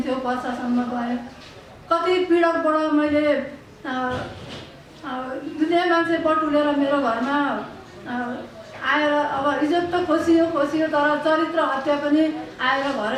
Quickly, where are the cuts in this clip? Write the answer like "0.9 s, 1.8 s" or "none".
none